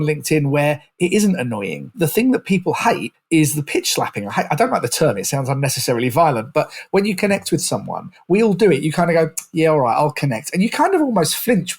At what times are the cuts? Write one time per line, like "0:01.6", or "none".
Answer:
0:01.9
0:03.1